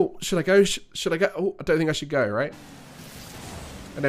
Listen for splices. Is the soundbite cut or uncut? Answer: uncut